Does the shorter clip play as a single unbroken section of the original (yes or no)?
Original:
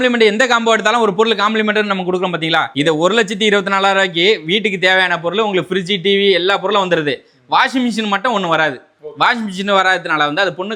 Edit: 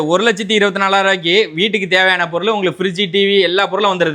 yes